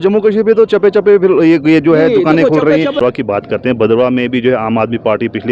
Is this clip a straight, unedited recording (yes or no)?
no